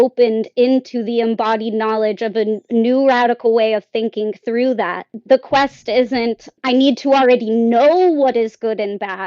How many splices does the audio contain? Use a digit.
1